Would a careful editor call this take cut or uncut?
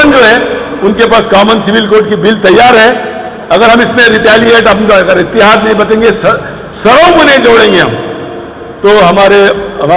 uncut